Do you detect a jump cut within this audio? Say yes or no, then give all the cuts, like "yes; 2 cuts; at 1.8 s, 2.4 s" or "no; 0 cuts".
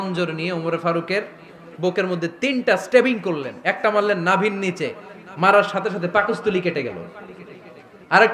no; 0 cuts